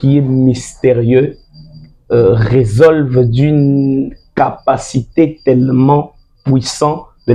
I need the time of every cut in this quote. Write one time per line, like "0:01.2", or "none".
none